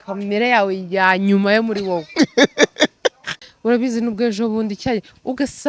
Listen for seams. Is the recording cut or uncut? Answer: cut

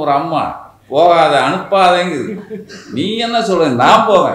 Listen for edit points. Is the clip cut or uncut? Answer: uncut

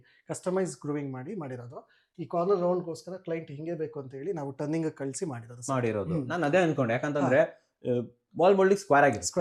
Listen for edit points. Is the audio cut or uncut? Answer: uncut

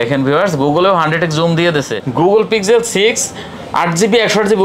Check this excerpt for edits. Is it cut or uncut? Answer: cut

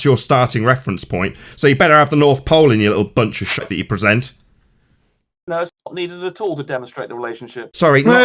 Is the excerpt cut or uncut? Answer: cut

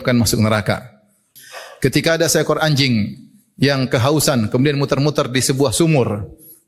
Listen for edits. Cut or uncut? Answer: cut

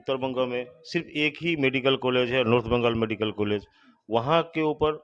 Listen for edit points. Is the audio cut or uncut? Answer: uncut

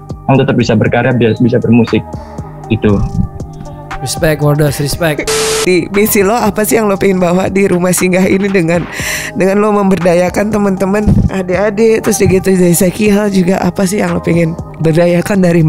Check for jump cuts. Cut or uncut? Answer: cut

